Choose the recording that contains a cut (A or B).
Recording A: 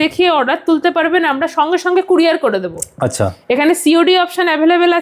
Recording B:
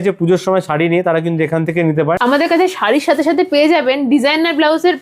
B